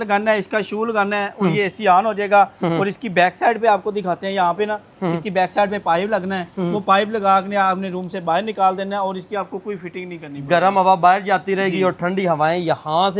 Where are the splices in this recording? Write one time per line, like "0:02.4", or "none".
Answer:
none